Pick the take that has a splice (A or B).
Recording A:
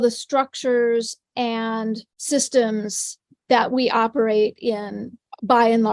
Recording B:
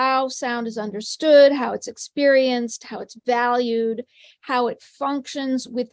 A